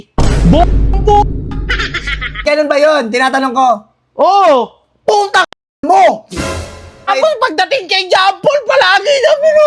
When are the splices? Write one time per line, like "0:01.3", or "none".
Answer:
0:02.4
0:07.1

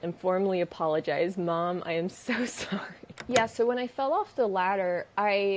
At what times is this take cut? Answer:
0:03.1

